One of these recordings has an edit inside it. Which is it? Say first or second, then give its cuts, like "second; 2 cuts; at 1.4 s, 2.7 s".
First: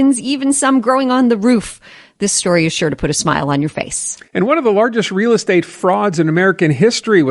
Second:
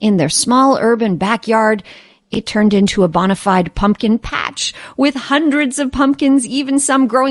first; 1 cut; at 4.1 s